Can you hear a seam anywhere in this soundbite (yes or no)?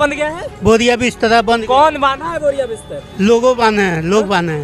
no